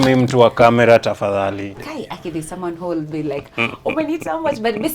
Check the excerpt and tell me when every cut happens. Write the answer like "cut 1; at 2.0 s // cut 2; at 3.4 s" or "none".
cut 1; at 1.6 s